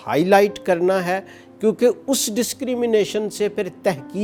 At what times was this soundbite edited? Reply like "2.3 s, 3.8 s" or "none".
none

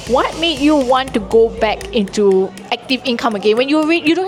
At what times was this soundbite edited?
none

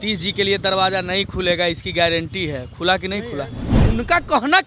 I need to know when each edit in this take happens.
3.7 s

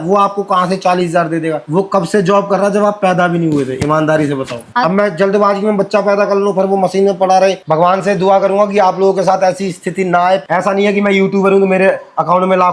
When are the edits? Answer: 4.6 s, 7.6 s, 10.4 s

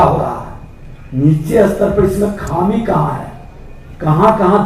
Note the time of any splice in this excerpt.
none

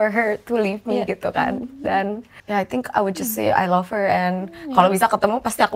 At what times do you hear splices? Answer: 2.3 s

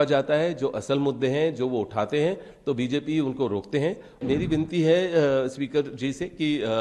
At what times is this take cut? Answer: 4.2 s

